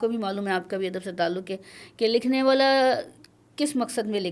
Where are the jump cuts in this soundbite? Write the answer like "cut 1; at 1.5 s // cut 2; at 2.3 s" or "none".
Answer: none